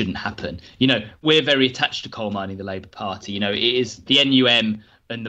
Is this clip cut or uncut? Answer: cut